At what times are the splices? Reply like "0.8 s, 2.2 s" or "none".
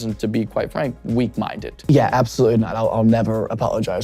1.9 s